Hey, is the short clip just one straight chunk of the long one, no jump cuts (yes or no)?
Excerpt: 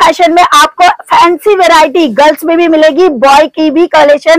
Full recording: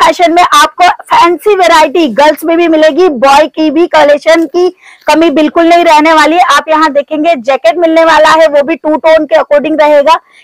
yes